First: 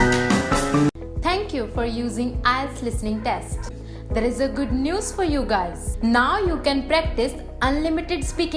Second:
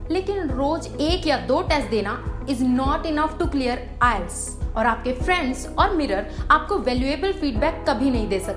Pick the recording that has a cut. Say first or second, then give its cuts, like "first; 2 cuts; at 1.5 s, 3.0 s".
first; 1 cut; at 0.9 s